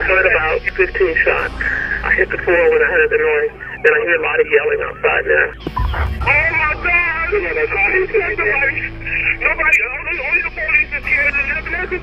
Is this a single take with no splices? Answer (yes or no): yes